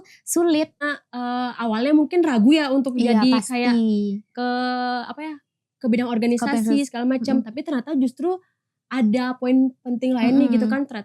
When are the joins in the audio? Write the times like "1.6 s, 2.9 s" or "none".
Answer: 0.9 s